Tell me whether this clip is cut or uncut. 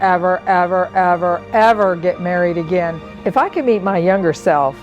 cut